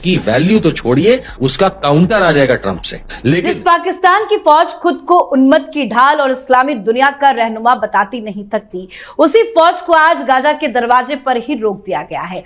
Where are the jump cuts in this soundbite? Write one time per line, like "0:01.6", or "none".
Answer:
0:03.5